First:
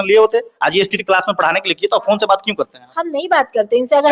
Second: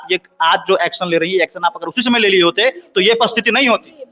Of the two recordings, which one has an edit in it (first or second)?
first